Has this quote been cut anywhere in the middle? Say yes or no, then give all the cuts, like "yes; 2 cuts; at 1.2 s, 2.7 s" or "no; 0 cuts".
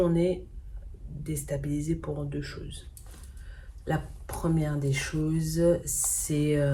no; 0 cuts